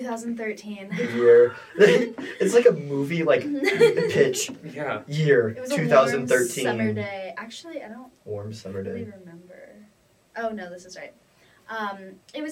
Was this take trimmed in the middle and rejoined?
no; 0 cuts

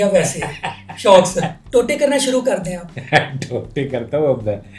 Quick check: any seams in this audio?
yes; 2 cuts; at 1.6 s, 2.9 s

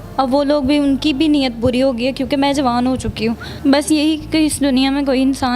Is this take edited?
yes; 1 cut; at 3.5 s

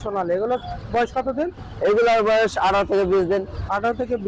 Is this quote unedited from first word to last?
yes; 0 cuts

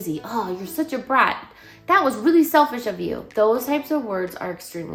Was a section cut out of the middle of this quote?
no; 0 cuts

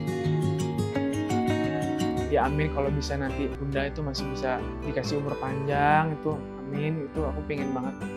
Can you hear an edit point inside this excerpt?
yes; 2 cuts; at 2.2 s, 3.6 s

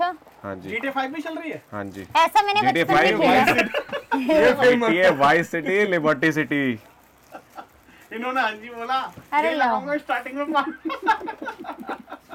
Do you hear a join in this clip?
no; 0 cuts

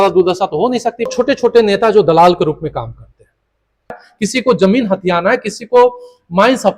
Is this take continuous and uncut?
no; 2 cuts; at 1.1 s, 4.1 s

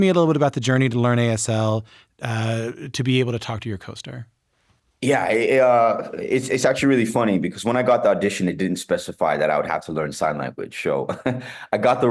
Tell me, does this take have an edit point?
no; 0 cuts

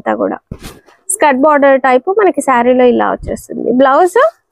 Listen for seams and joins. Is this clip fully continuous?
yes; 0 cuts

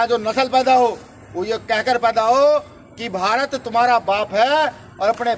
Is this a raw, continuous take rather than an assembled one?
yes; 0 cuts

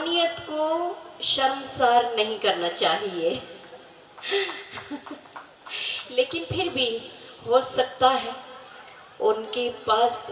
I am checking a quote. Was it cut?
no; 0 cuts

